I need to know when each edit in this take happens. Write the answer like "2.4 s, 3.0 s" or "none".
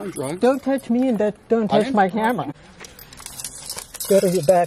2.5 s